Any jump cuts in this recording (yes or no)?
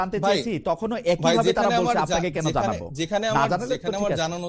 no